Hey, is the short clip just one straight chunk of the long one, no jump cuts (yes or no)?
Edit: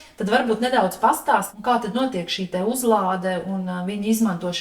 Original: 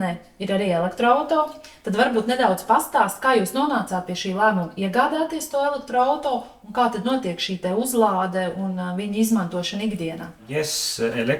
no